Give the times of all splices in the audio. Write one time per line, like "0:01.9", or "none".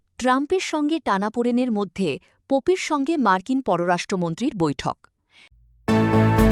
0:05.5